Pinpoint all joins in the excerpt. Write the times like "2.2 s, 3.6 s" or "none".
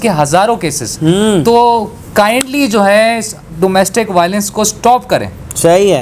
none

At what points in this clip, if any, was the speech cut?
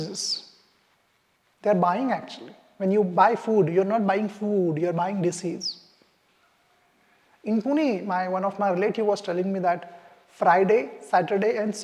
none

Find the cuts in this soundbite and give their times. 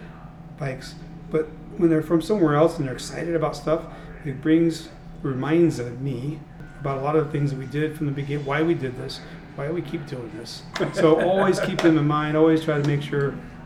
10.7 s

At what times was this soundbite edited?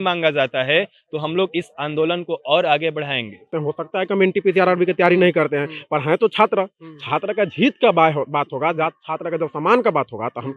3.5 s

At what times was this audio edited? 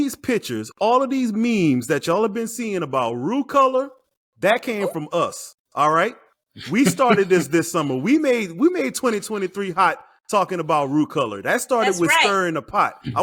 none

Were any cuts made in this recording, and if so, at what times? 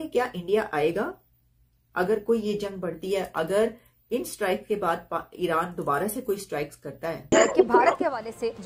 7.2 s

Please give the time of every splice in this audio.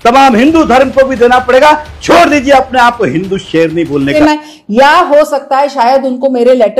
4.1 s

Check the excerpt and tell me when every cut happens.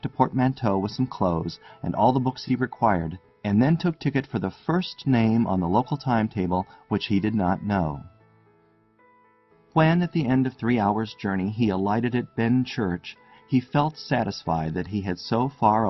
2.4 s

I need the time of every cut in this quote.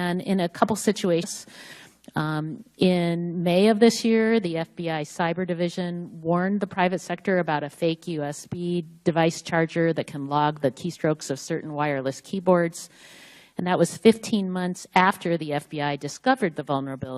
none

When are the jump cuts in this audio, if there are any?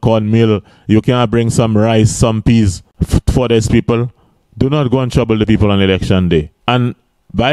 2.9 s, 6.6 s

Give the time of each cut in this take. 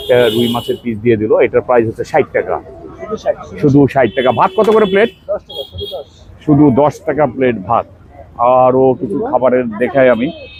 none

